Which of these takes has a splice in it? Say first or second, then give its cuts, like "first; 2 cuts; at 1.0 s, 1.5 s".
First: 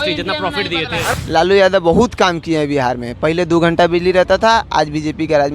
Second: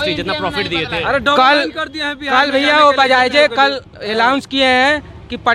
first; 1 cut; at 1.0 s